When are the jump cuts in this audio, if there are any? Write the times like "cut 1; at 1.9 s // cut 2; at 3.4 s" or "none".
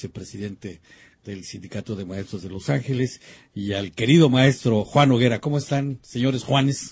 cut 1; at 4.6 s